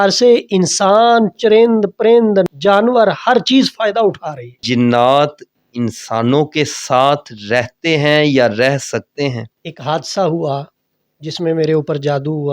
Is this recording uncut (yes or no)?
no